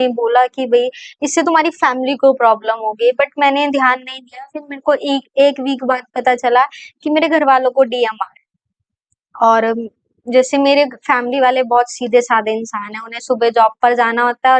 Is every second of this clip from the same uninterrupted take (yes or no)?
yes